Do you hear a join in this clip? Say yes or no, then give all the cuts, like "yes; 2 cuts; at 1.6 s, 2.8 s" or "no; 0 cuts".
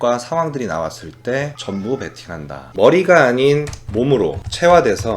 yes; 1 cut; at 2.7 s